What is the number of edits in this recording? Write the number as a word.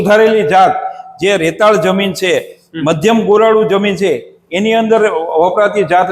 zero